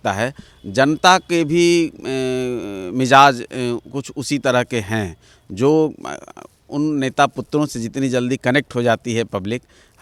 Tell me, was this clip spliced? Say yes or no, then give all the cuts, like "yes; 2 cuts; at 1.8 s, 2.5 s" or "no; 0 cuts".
no; 0 cuts